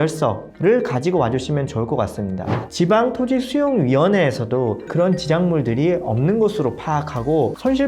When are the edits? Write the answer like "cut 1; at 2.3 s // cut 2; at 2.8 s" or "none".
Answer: cut 1; at 2.6 s